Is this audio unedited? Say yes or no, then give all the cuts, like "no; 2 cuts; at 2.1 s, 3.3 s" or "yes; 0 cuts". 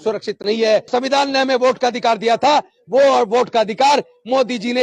no; 1 cut; at 0.9 s